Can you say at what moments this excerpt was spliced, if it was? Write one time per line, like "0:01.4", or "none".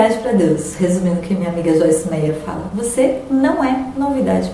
none